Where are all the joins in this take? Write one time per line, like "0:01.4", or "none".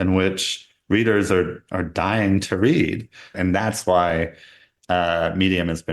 0:03.3